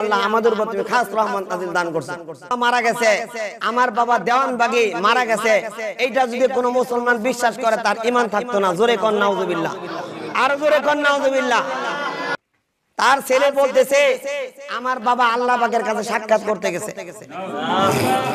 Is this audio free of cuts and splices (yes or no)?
no